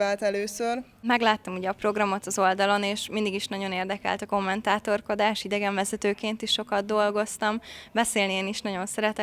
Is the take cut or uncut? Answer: cut